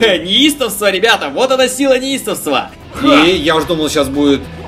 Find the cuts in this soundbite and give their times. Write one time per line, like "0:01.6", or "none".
0:02.7